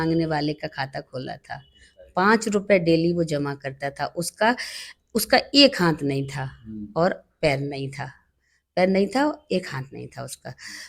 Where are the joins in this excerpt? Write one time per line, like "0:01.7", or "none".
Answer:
none